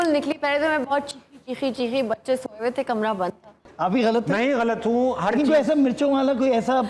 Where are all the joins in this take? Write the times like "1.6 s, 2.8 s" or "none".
3.6 s